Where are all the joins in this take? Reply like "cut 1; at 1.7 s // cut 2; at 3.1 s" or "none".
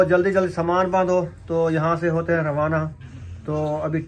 none